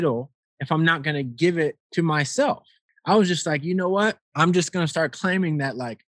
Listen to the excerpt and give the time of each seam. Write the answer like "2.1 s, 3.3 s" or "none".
1.8 s, 2.9 s, 4.3 s